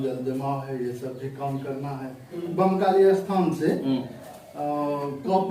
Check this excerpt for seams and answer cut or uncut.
cut